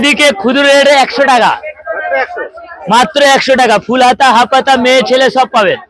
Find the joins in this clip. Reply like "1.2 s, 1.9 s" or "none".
none